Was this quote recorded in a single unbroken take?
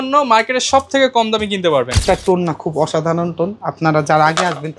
no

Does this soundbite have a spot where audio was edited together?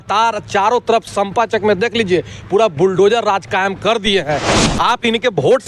yes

